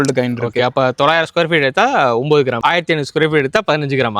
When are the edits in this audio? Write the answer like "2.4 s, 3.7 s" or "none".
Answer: 2.6 s